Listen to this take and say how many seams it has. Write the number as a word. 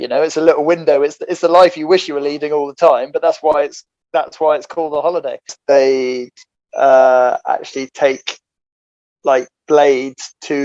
one